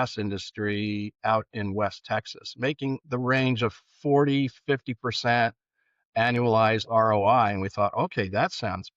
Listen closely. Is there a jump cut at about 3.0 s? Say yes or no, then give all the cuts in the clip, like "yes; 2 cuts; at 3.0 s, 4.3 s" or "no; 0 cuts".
yes; 1 cut; at 3.0 s